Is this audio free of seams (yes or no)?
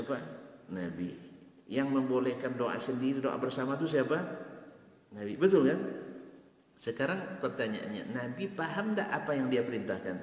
yes